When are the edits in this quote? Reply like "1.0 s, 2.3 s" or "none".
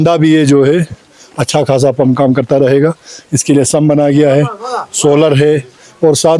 none